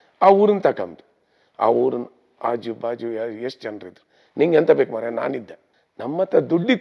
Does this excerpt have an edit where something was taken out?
no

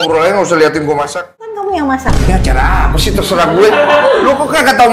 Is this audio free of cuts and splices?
no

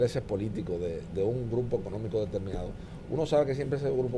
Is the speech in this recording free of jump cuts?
yes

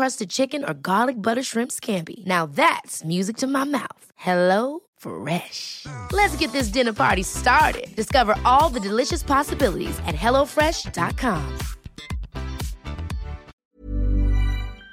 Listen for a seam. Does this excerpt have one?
yes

